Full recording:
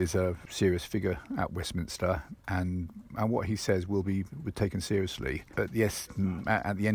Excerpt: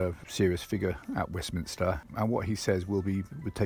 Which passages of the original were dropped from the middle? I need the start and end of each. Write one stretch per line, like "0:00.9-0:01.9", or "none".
0:02.3-0:03.1